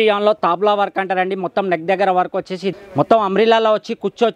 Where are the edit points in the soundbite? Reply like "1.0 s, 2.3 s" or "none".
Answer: 2.7 s